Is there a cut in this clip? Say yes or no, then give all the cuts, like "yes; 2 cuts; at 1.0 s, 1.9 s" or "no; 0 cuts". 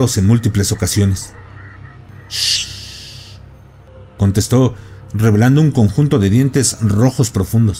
yes; 2 cuts; at 2.1 s, 3.9 s